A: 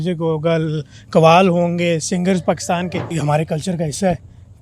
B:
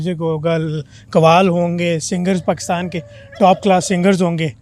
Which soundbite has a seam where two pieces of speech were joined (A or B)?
A